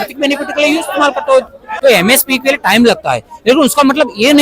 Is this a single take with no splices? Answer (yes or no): no